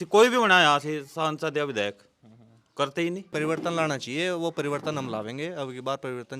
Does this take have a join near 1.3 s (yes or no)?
no